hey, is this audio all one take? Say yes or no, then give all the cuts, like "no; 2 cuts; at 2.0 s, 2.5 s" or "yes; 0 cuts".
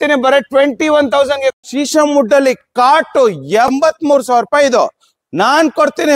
no; 2 cuts; at 1.5 s, 3.7 s